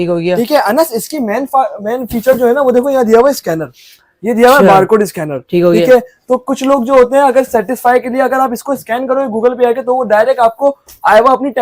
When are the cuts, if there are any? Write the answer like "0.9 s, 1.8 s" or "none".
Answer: none